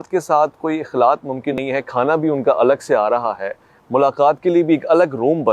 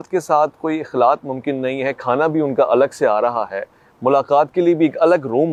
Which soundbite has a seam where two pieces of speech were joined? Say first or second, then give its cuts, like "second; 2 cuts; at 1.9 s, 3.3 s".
first; 1 cut; at 1.6 s